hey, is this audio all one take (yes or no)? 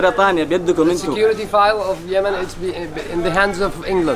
yes